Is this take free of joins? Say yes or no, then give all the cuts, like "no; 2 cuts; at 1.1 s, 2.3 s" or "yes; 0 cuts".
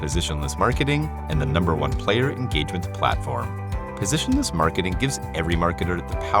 yes; 0 cuts